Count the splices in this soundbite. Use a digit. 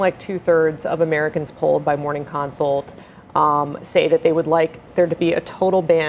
0